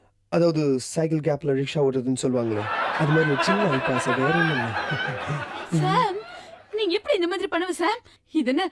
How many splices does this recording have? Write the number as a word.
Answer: zero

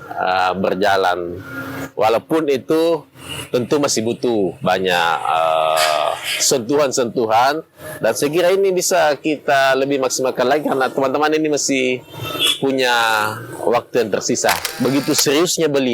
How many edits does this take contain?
one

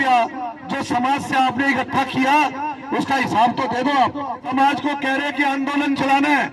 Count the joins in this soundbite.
one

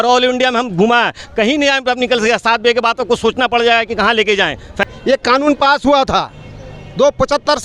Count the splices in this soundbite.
one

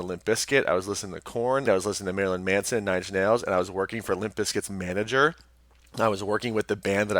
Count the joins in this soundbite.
one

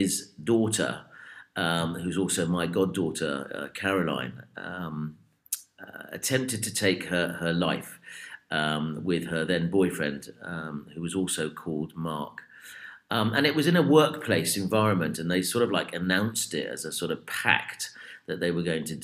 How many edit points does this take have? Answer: zero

